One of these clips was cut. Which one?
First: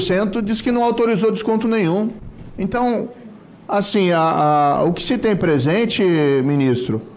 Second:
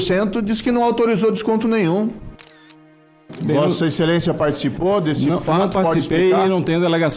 second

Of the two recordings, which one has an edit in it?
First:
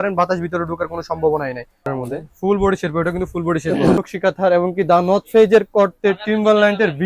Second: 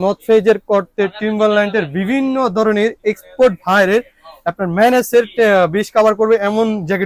first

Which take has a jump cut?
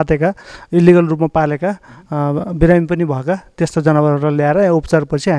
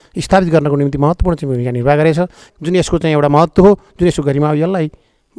second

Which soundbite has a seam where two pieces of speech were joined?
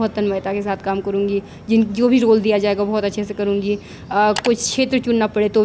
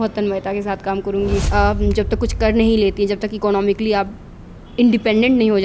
second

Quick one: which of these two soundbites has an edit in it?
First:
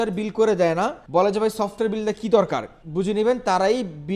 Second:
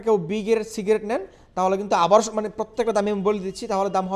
first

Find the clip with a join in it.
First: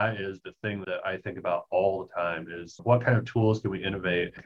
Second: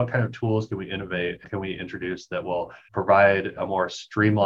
second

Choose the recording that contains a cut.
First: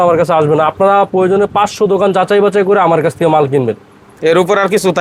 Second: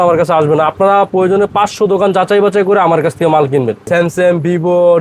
second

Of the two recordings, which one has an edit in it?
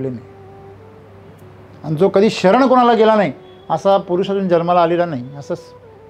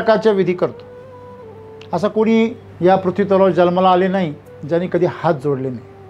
second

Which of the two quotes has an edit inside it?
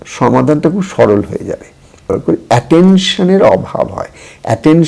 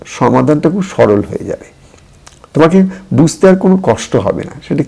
first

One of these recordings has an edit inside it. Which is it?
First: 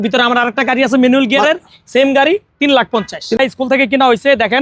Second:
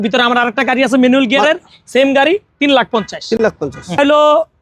first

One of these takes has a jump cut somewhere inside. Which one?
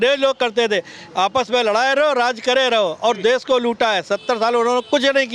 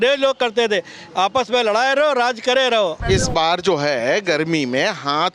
second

